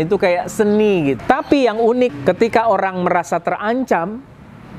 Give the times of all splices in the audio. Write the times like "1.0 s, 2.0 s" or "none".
1.2 s, 2.1 s